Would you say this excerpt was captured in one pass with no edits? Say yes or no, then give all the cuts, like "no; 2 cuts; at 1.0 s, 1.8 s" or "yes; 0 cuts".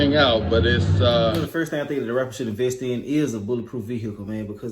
no; 1 cut; at 1.5 s